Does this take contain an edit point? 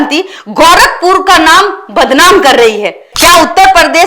yes; 1 cut; at 3.1 s

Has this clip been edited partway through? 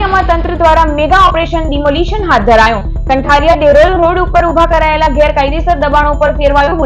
no; 0 cuts

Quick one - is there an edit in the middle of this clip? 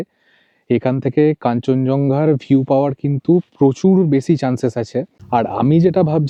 no; 0 cuts

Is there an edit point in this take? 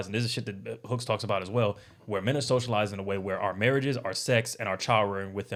no; 0 cuts

